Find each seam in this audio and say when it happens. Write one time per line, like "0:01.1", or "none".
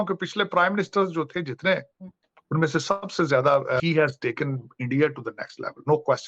0:03.8